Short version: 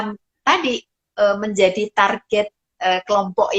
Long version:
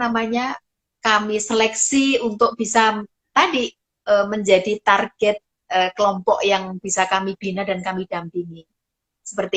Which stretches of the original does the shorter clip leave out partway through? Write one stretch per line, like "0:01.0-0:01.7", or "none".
none